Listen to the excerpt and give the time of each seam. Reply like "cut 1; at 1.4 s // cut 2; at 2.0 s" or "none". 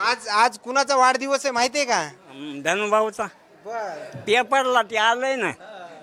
none

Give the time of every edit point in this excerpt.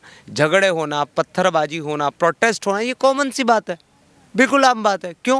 none

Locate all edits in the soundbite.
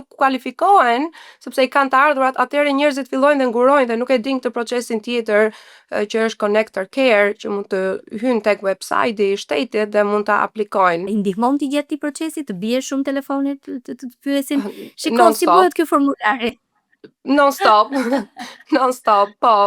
cut 1; at 11.1 s

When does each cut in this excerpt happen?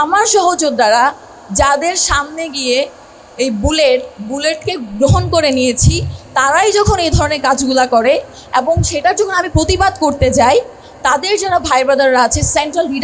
none

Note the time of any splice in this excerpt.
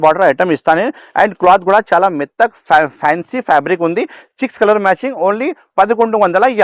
none

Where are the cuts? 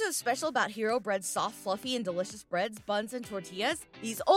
none

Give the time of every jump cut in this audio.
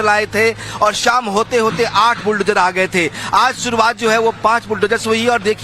none

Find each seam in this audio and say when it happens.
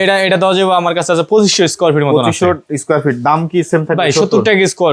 none

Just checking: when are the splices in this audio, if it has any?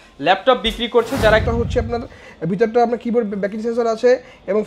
cut 1; at 1.4 s

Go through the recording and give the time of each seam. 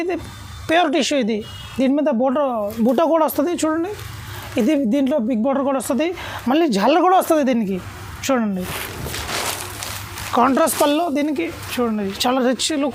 none

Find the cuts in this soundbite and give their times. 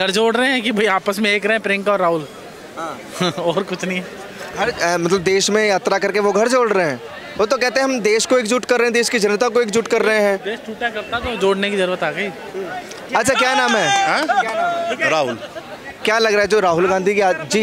none

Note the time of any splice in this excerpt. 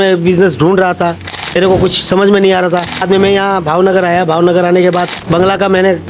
cut 1; at 1.6 s // cut 2; at 3.0 s // cut 3; at 5.2 s

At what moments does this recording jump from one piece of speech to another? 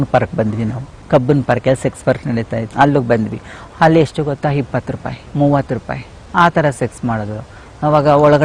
cut 1; at 2.6 s

